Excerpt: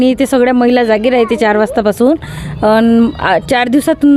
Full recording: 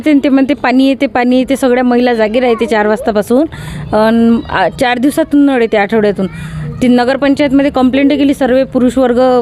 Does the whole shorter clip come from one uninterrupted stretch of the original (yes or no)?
yes